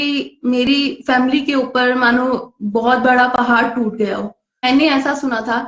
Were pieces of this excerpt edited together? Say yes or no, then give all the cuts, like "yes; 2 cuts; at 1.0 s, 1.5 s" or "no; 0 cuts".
yes; 1 cut; at 4.6 s